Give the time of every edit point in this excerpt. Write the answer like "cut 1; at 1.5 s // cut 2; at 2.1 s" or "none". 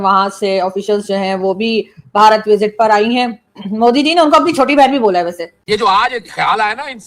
cut 1; at 5.4 s